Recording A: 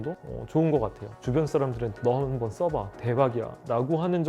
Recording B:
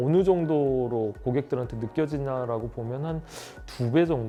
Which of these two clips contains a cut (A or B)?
A